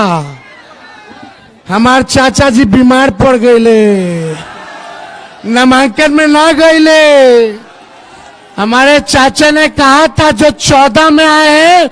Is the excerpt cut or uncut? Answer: uncut